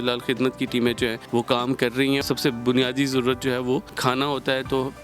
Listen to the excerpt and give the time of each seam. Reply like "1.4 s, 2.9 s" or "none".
1.2 s, 2.2 s, 3.9 s